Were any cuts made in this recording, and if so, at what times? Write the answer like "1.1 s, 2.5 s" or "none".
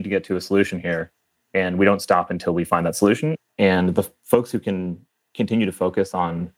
3.3 s

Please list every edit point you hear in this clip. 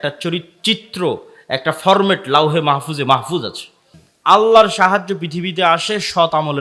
4.0 s

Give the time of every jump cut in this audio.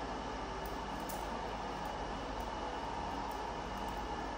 none

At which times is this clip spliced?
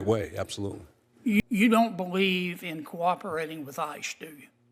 1.4 s

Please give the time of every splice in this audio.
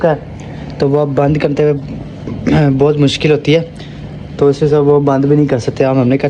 none

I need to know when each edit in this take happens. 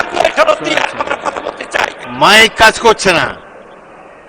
2.0 s

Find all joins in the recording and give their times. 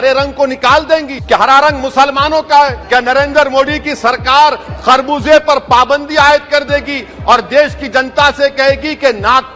1.1 s, 2.8 s

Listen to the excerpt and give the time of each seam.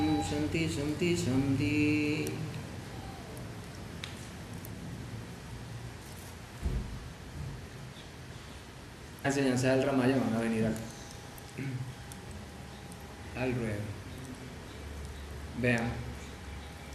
none

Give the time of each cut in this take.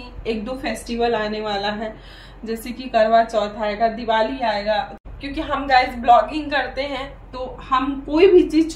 5.0 s

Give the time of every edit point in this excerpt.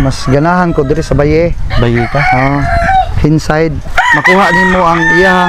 3.8 s

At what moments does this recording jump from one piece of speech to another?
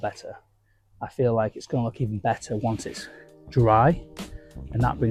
none

